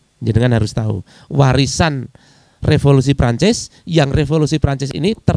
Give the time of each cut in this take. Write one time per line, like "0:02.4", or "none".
none